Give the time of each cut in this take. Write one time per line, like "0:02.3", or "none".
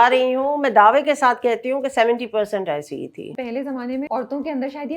0:03.2
0:04.1

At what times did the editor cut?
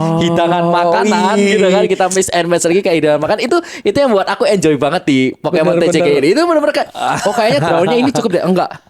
none

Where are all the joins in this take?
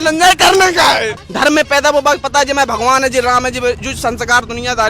0:01.2

